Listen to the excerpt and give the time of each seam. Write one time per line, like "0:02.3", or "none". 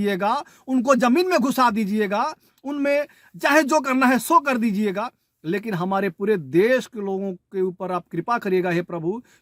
none